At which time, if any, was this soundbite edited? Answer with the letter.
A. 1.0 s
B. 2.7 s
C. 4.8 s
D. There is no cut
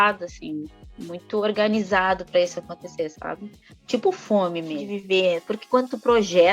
C